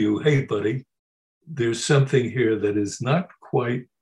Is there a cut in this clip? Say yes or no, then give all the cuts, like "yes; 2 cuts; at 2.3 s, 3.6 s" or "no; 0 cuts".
no; 0 cuts